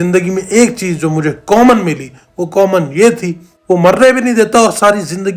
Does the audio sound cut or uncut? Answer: cut